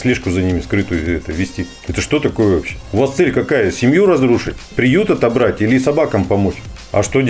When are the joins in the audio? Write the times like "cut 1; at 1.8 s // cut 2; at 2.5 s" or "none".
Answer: none